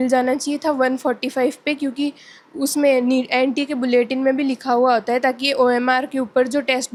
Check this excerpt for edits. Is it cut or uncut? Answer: uncut